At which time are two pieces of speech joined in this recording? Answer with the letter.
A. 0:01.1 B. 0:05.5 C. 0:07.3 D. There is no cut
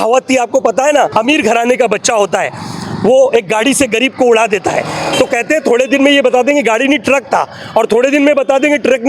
A